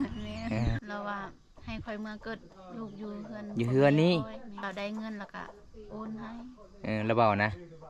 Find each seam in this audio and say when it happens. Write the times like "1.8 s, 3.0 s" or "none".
0.8 s, 4.5 s